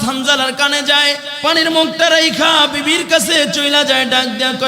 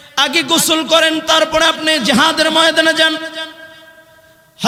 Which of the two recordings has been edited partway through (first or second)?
first